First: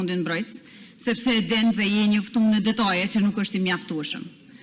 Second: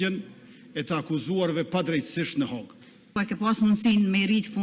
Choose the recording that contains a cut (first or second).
second